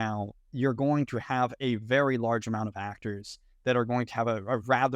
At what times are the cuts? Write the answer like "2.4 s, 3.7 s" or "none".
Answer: none